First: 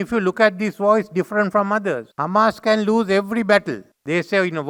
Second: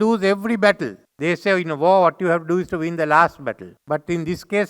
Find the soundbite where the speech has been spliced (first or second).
second